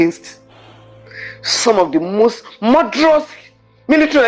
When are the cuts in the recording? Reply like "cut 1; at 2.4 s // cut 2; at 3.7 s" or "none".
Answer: none